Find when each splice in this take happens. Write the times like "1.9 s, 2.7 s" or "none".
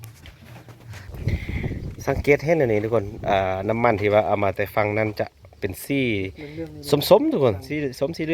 1.0 s